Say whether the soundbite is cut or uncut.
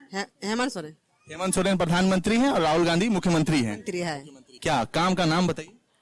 cut